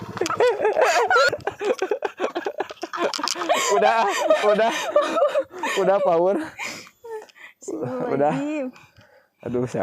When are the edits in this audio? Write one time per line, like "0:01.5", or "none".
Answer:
0:01.3